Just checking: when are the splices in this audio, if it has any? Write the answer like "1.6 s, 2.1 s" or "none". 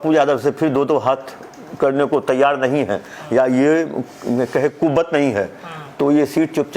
none